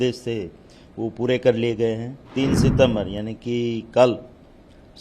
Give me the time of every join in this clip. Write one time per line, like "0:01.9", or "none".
0:02.2